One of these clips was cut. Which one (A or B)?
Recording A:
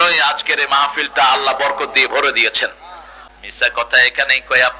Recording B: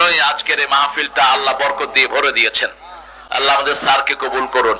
A